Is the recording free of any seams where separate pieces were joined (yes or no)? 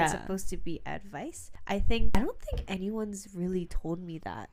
yes